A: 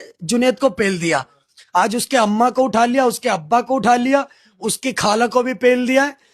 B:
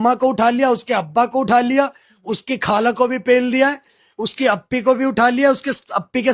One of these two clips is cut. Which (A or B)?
A